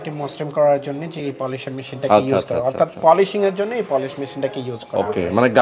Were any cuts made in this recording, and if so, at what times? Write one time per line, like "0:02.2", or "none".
none